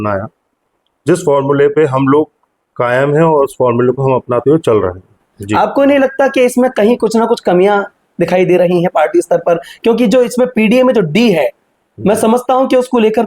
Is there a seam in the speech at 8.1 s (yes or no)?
no